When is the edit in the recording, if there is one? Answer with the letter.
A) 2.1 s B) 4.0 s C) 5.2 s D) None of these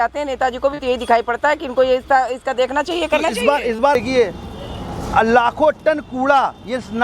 B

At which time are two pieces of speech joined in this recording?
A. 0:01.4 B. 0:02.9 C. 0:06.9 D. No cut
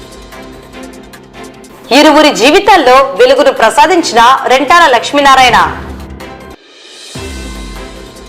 A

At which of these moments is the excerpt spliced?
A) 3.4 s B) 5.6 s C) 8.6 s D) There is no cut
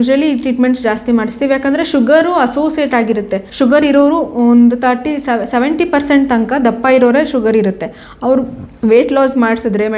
A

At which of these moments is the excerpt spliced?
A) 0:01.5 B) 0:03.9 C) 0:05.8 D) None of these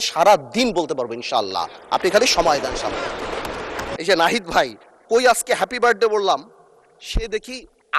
B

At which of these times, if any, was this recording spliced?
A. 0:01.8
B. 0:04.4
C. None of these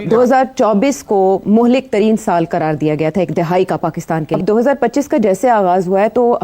B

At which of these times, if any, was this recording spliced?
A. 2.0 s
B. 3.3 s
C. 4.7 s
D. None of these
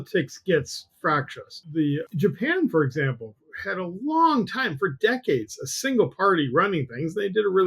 A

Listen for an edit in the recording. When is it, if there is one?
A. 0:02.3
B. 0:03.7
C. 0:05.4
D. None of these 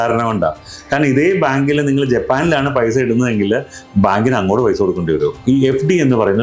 C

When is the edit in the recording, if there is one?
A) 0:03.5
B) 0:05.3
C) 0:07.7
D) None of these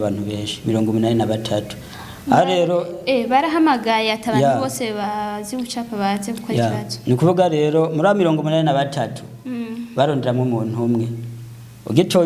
D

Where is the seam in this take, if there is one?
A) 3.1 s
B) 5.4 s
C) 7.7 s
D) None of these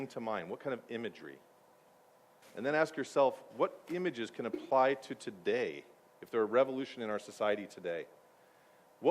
C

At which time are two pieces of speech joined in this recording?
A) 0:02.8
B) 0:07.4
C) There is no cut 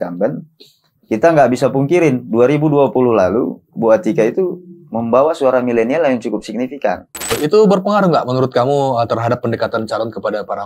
B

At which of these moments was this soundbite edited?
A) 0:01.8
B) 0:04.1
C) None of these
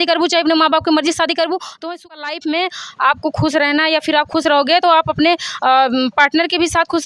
A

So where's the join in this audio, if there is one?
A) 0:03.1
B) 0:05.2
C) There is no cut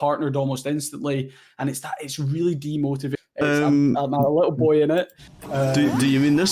A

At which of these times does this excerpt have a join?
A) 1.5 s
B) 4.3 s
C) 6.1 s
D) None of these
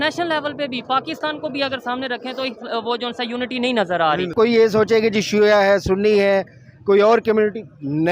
B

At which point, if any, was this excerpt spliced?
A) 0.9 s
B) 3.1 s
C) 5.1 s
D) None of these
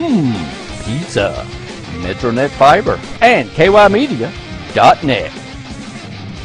B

